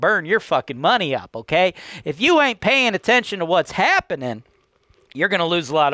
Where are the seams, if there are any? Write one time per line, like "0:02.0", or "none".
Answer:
none